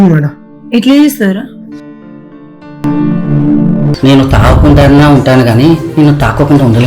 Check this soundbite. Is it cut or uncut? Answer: cut